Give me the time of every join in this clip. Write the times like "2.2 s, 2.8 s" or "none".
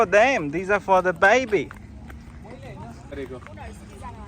3.1 s